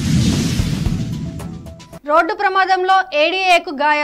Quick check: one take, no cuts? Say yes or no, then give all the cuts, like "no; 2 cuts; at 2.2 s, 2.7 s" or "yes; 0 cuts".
yes; 0 cuts